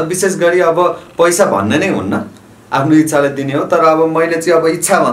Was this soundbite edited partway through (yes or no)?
no